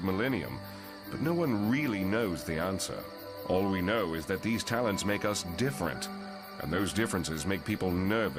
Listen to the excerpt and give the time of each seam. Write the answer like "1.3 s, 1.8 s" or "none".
2.8 s